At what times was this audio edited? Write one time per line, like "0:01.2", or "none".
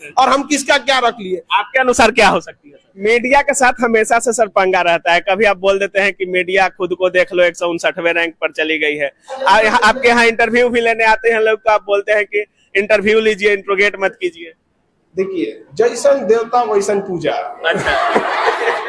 0:02.9